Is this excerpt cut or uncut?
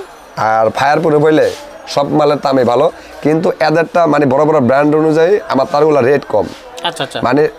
uncut